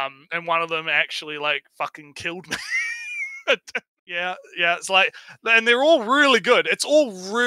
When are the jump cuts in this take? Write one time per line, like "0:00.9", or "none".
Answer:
0:03.8